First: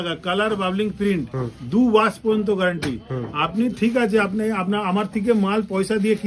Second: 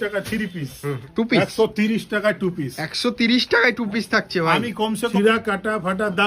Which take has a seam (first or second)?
second